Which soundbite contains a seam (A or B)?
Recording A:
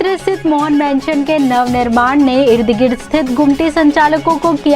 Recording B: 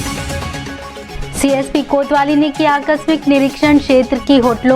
B